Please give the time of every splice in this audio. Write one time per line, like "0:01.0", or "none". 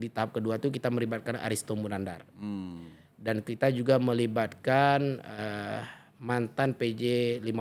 none